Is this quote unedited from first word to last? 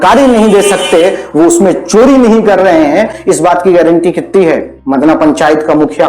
no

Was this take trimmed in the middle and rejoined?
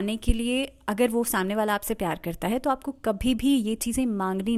no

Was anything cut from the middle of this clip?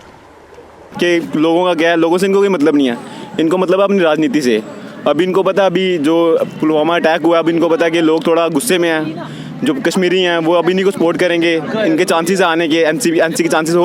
yes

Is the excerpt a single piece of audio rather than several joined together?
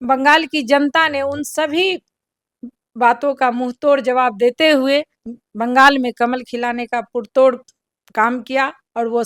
yes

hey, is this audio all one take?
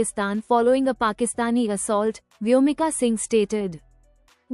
yes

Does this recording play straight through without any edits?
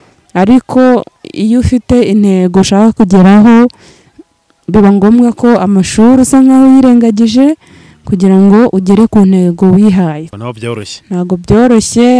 no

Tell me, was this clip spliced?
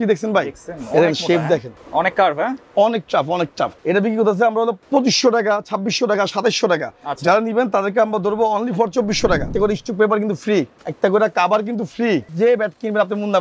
yes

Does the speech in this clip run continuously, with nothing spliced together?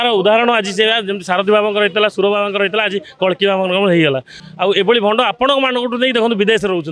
no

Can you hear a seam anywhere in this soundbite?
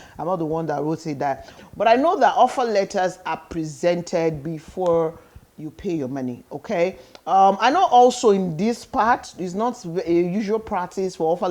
yes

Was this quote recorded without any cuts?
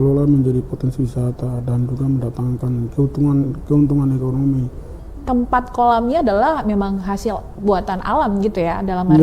no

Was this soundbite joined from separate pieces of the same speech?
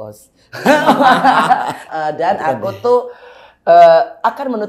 yes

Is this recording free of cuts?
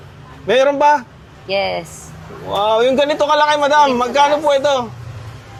yes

